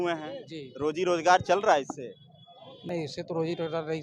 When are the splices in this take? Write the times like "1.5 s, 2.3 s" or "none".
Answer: 2.8 s